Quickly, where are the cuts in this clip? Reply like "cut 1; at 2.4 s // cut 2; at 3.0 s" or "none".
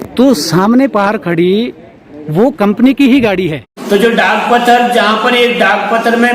cut 1; at 3.7 s